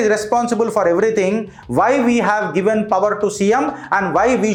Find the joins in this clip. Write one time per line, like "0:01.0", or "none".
none